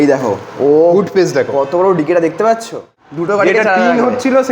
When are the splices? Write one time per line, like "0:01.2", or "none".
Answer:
0:02.6